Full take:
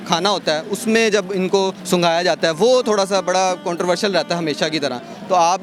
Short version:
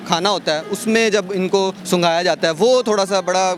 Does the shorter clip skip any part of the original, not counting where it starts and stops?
no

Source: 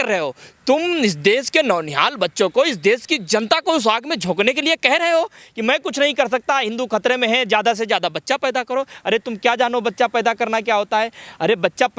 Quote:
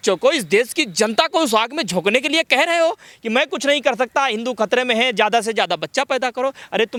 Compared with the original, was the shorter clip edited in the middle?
no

